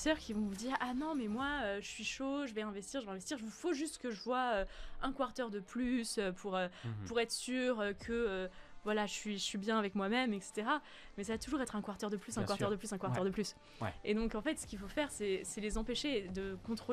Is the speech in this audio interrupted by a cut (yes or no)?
no